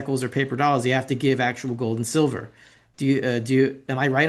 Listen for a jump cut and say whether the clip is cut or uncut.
uncut